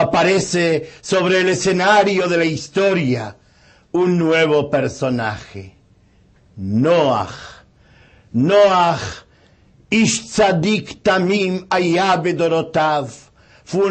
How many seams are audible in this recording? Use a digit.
1